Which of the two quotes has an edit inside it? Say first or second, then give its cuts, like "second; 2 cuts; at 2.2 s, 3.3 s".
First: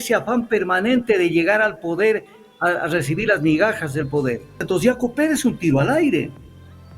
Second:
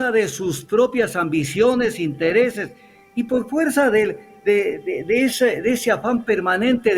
first; 1 cut; at 4.6 s